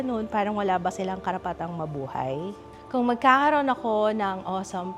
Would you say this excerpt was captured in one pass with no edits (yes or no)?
no